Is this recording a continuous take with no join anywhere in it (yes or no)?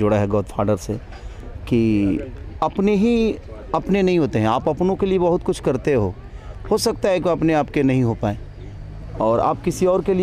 yes